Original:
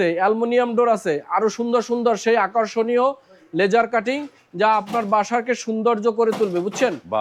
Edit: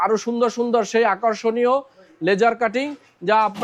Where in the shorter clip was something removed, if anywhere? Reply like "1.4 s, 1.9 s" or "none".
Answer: none